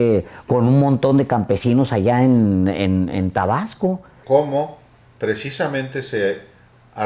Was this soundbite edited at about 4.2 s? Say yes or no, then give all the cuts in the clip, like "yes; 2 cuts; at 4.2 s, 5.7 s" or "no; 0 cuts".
yes; 1 cut; at 4.2 s